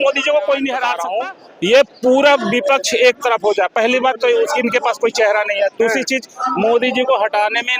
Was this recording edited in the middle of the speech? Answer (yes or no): yes